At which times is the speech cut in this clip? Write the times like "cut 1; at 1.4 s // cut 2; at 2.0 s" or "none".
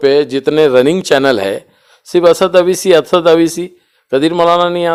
none